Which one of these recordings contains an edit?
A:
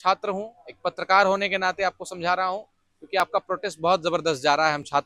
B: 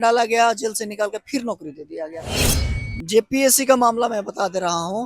B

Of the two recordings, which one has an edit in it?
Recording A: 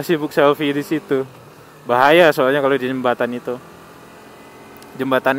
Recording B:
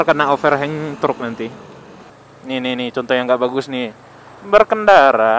B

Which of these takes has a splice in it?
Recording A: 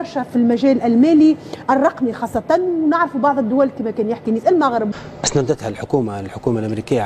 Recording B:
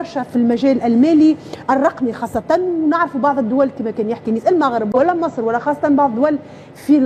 A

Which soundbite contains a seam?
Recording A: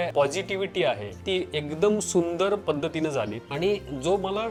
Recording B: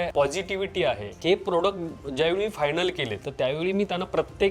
B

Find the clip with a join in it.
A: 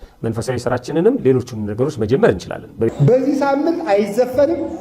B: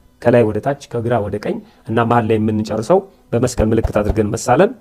A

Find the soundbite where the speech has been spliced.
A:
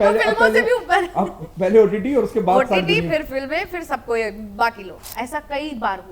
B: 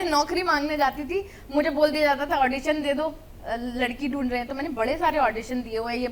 A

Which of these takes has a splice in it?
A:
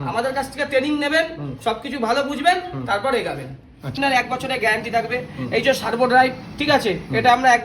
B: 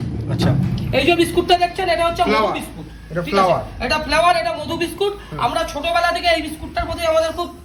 A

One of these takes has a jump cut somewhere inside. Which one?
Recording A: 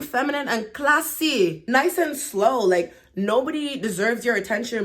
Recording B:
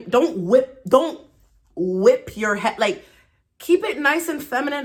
A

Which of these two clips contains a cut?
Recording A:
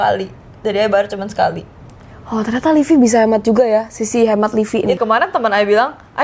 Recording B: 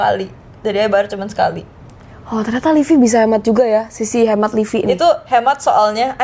A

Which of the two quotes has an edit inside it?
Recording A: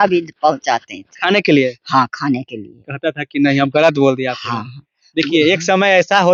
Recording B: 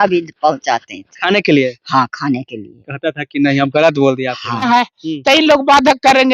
B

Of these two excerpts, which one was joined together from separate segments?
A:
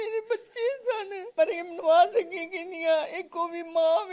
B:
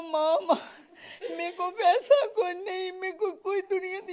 A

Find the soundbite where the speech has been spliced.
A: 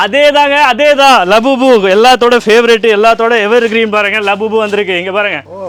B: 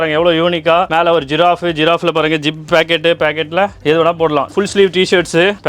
B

